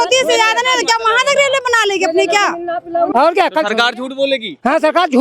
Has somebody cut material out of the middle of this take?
yes; 1 cut; at 3.1 s

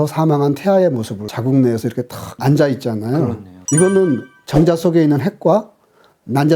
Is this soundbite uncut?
no; 3 cuts; at 1.3 s, 2.2 s, 4.5 s

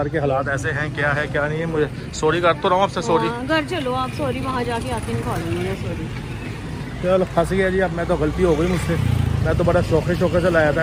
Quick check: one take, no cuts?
yes; 0 cuts

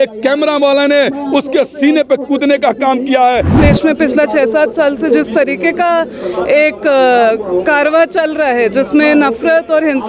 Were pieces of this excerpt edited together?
yes; 1 cut; at 3.5 s

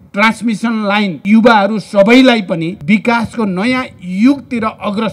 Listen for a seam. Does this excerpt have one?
yes; 2 cuts; at 1.2 s, 2.7 s

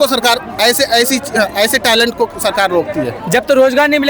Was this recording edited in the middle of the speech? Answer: yes; 1 cut; at 3.1 s

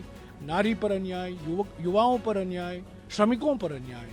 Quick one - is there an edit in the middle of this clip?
no; 0 cuts

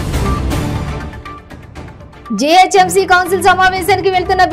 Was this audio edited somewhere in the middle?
yes; 1 cut; at 1.4 s

